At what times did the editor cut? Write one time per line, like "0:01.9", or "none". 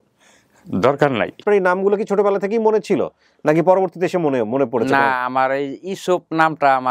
0:01.4